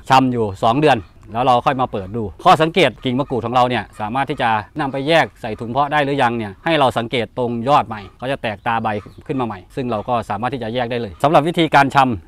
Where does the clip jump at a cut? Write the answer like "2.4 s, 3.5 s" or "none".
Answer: 3.0 s, 4.7 s, 11.1 s